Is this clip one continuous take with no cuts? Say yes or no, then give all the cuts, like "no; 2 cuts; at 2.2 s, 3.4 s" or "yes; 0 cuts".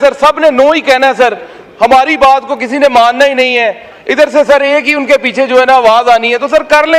yes; 0 cuts